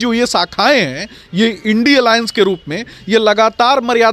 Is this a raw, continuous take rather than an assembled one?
yes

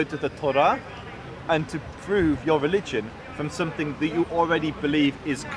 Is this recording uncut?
yes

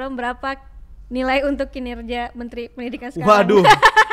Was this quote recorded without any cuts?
yes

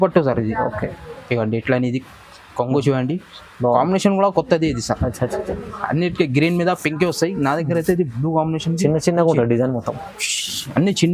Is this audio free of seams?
yes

